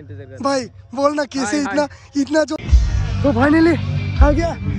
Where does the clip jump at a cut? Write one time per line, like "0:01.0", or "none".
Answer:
0:02.6